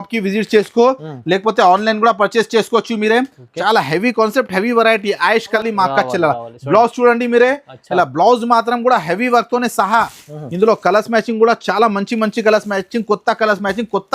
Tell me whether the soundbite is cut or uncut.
cut